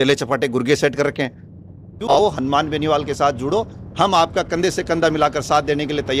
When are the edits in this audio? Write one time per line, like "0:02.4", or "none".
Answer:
0:02.2